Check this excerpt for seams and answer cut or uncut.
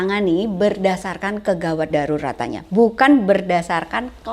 uncut